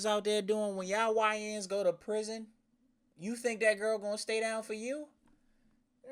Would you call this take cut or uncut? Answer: uncut